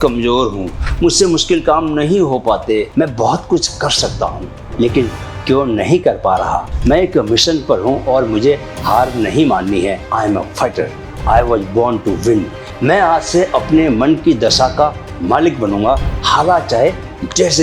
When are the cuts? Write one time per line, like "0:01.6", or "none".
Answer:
0:02.9
0:06.6
0:10.0
0:12.7